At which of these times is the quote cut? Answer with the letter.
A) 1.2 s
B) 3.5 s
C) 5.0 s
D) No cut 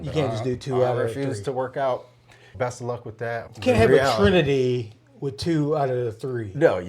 B